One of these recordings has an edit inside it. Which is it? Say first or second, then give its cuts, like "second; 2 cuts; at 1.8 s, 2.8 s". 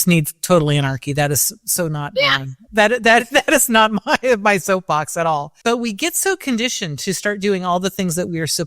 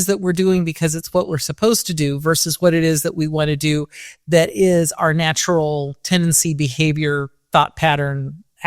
first; 1 cut; at 5.5 s